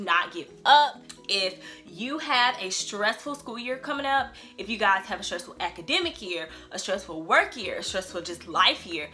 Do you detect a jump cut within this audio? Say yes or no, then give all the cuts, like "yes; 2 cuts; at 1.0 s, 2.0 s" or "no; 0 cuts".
yes; 1 cut; at 1.0 s